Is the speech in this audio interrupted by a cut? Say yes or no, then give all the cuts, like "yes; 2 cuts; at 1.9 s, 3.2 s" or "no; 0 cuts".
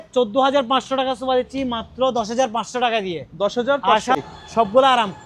yes; 1 cut; at 4.2 s